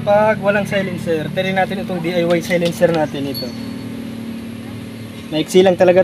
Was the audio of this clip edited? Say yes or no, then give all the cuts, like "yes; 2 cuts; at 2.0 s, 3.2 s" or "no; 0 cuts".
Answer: no; 0 cuts